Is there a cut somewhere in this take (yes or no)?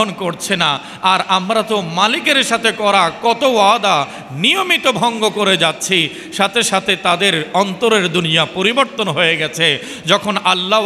no